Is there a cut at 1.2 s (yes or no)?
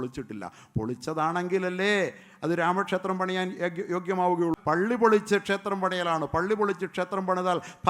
no